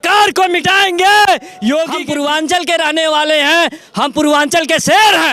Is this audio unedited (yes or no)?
no